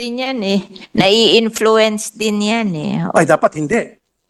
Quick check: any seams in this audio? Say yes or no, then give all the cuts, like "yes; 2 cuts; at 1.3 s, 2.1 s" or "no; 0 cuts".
no; 0 cuts